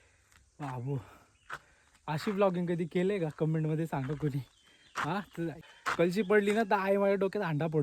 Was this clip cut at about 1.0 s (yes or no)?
no